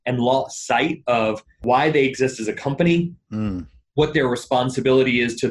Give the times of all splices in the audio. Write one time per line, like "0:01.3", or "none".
0:01.6